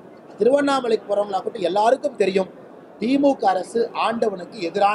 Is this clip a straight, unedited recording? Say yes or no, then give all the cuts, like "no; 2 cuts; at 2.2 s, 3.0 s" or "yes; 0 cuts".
yes; 0 cuts